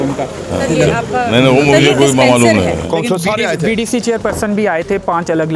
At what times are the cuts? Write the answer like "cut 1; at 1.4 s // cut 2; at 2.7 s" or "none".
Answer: none